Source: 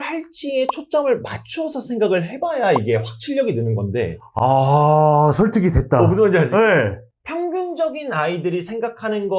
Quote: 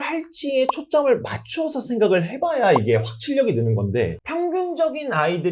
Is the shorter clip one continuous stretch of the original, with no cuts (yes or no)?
no